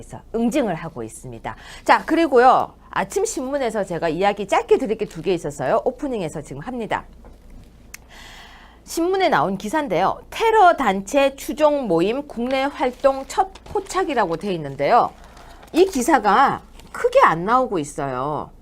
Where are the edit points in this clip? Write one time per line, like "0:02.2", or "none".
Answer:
0:09.4